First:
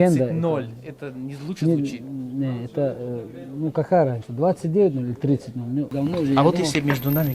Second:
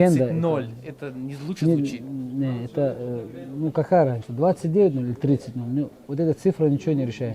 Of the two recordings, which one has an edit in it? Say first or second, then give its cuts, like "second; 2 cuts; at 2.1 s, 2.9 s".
first; 1 cut; at 5.9 s